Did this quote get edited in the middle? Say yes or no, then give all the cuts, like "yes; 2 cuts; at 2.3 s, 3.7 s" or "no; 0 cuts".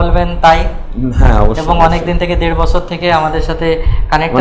yes; 1 cut; at 2.9 s